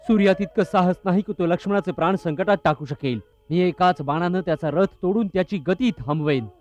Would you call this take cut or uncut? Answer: cut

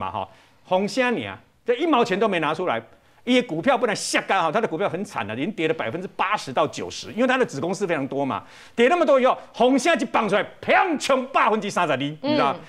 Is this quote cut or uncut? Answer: uncut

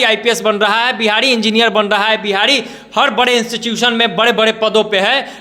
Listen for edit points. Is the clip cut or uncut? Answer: uncut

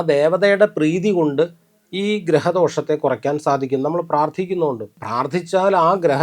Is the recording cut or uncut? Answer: cut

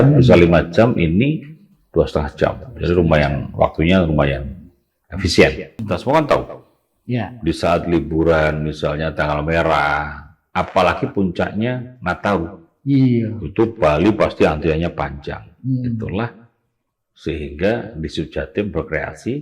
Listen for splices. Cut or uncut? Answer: cut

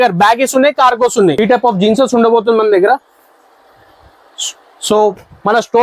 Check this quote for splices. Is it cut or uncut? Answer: cut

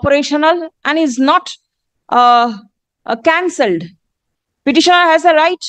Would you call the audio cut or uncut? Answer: uncut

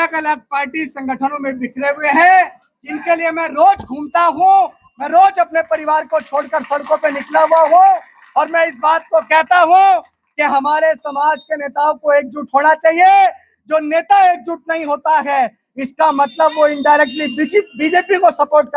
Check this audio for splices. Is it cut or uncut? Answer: uncut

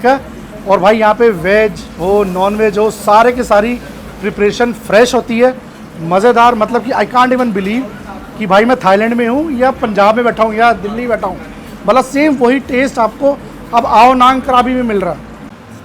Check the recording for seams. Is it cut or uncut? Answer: uncut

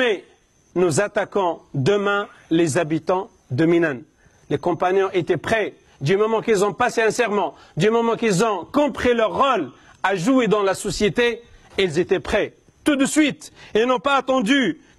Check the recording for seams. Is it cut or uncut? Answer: uncut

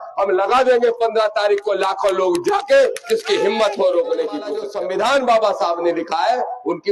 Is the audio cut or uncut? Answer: cut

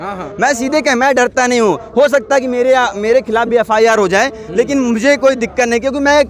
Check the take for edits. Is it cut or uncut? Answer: uncut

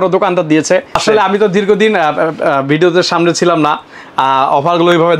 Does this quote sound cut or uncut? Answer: cut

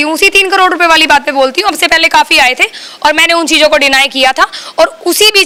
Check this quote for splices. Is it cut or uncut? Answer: uncut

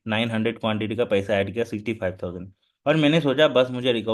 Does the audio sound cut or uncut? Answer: uncut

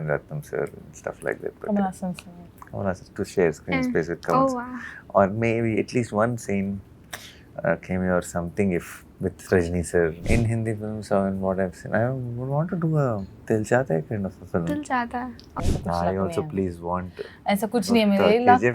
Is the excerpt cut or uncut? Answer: cut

